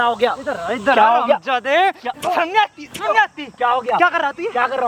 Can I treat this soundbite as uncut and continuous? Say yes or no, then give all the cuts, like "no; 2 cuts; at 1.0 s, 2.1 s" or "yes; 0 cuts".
yes; 0 cuts